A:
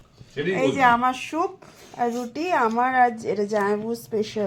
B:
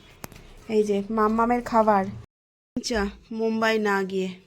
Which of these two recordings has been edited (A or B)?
B